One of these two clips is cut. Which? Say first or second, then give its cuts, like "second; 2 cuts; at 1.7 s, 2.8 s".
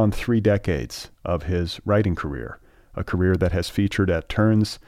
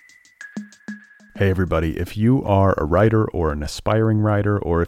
second; 1 cut; at 1.0 s